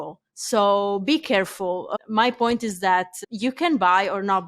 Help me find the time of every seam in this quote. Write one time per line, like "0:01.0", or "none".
0:01.9
0:03.2